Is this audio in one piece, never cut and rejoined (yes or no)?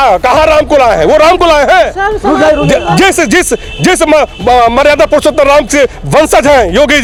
yes